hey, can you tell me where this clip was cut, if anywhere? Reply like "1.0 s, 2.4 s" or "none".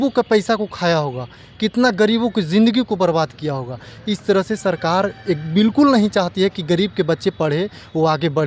none